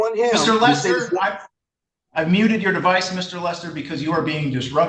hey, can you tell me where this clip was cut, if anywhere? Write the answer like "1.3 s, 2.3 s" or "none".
none